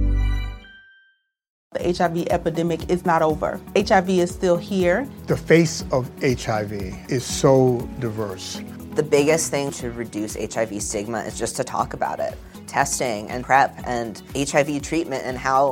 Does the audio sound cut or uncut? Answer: cut